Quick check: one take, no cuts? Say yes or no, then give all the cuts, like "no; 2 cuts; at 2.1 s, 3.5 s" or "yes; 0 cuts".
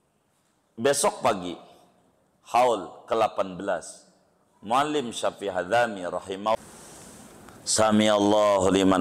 no; 1 cut; at 6.5 s